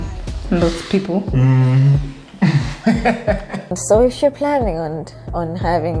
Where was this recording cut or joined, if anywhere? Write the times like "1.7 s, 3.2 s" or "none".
3.8 s